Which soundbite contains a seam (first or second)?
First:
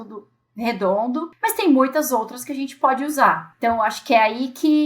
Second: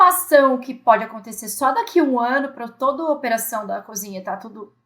first